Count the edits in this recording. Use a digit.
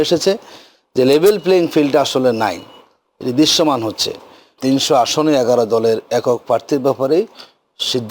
1